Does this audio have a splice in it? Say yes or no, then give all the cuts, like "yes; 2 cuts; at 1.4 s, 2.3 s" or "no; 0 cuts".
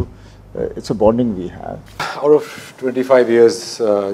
yes; 1 cut; at 2.1 s